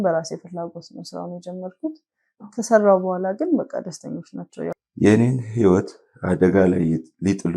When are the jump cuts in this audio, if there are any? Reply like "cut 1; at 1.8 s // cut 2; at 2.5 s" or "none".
cut 1; at 4.8 s